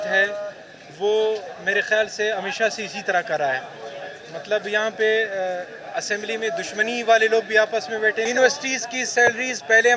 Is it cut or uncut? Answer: cut